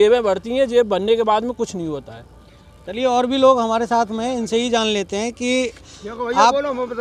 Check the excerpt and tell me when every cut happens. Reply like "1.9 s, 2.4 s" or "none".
none

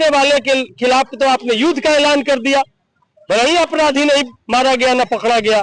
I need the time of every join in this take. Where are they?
none

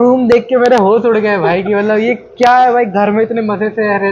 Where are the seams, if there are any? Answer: none

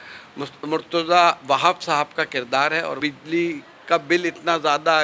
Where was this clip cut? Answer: 3.0 s

